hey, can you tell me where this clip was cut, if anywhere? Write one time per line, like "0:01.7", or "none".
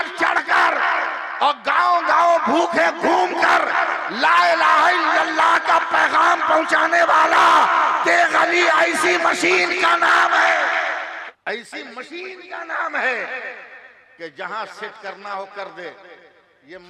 0:11.2